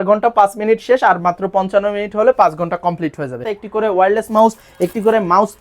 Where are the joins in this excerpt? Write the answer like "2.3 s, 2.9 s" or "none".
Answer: 3.5 s